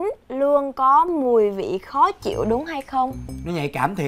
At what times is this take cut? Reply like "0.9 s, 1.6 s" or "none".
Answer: none